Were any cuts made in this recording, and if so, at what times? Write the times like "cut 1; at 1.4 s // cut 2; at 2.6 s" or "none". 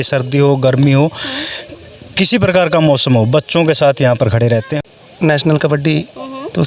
cut 1; at 4.8 s